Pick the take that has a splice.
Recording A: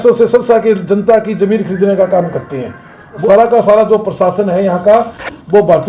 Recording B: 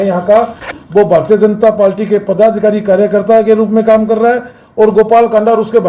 A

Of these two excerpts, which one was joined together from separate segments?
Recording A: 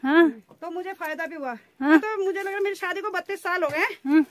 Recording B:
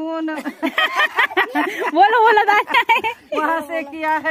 A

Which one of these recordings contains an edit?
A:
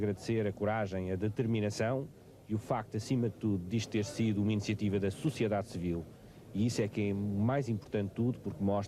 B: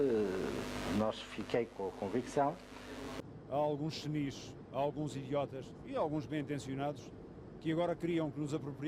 B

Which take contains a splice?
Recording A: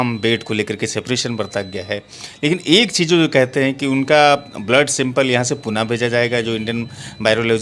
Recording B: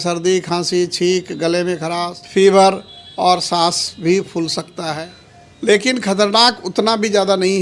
B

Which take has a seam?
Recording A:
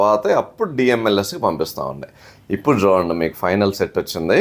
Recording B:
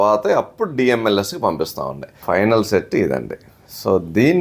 B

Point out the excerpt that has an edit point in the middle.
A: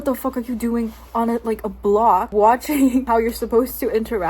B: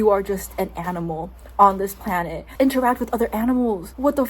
A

